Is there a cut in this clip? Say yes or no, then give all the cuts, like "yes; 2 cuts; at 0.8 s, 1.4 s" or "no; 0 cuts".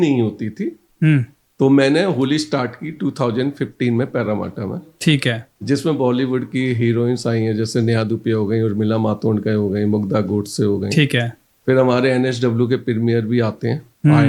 no; 0 cuts